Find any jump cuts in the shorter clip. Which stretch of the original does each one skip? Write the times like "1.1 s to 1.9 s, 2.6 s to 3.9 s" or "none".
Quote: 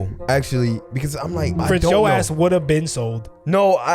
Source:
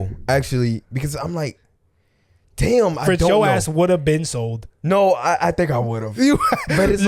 1.6 s to 3.0 s